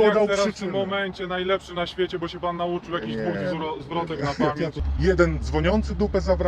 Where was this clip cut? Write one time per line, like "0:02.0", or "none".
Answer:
0:04.8